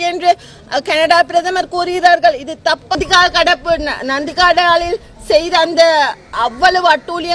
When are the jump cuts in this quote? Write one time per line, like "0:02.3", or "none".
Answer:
0:03.0